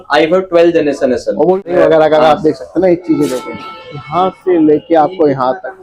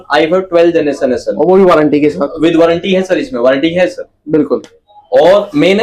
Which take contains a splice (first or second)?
first